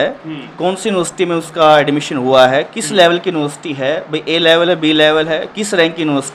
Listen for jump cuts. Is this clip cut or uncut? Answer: uncut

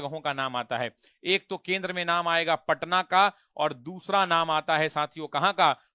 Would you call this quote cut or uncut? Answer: uncut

